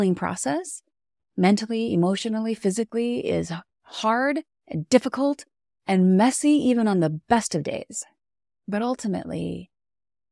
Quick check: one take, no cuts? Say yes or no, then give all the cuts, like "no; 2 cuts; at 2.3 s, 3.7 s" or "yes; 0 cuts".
yes; 0 cuts